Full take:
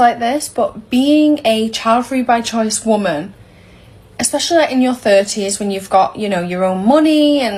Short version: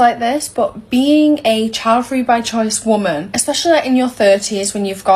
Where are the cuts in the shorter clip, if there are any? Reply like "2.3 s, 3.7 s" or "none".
3.3 s